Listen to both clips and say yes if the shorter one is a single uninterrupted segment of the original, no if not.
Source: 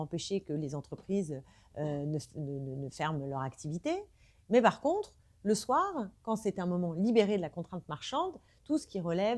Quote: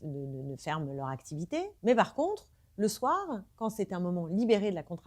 no